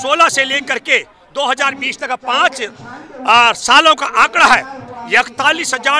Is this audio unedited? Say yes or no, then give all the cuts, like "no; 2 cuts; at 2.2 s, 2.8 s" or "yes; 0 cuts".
yes; 0 cuts